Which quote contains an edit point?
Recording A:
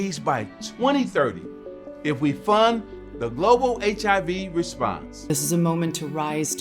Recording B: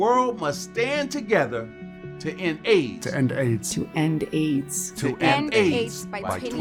A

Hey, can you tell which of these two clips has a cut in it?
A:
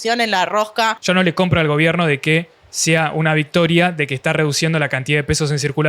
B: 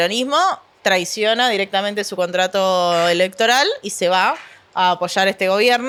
A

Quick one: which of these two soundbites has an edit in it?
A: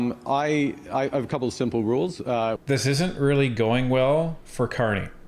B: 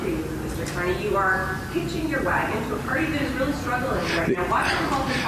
A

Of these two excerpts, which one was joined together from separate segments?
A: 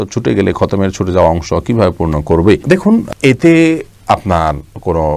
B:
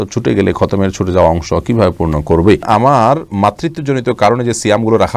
B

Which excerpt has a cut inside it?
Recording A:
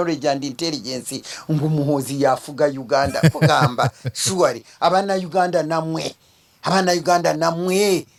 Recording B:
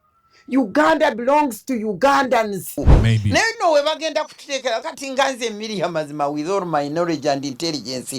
B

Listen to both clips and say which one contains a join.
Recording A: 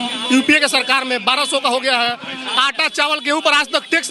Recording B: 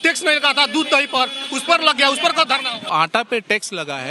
B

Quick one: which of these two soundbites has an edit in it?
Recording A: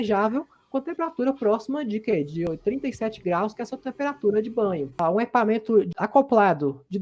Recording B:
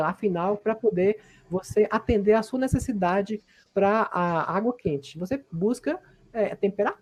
A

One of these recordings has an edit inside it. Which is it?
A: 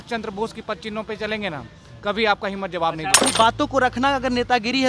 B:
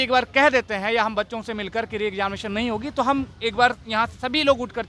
A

